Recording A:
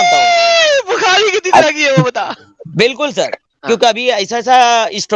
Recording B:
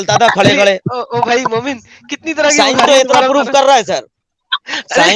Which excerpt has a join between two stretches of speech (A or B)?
A